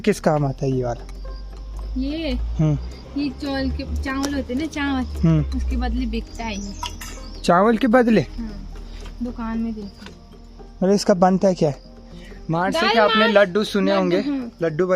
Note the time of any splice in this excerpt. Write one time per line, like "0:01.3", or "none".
none